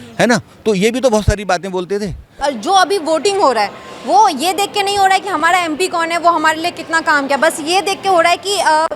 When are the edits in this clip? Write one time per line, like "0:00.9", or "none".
0:02.4